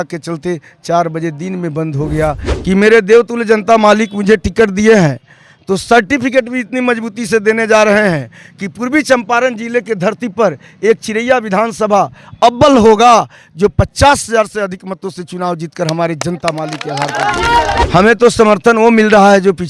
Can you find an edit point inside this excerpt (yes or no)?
yes